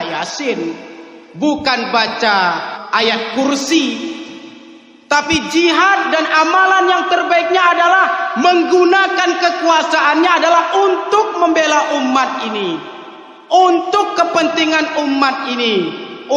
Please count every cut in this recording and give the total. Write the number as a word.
one